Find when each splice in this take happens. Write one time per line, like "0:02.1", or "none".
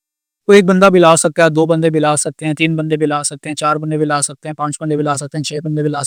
none